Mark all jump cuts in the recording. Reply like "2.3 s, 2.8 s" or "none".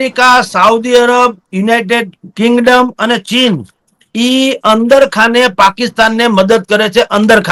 none